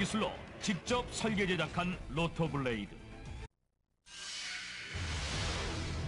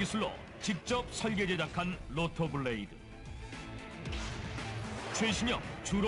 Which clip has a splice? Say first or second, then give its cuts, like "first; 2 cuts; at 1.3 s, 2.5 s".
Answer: second; 1 cut; at 3.5 s